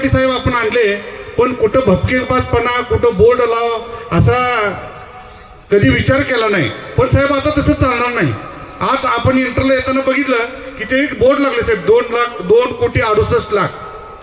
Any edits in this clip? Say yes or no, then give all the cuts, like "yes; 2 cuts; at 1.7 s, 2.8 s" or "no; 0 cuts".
no; 0 cuts